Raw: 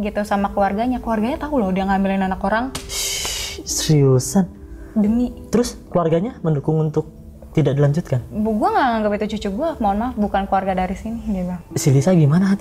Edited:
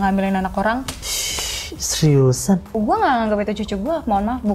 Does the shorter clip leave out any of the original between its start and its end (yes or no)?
yes